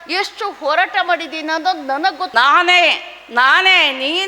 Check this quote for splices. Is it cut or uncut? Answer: cut